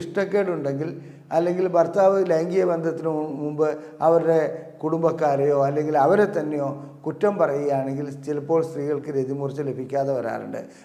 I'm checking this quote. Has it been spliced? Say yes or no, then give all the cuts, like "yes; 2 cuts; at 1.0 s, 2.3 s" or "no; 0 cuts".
no; 0 cuts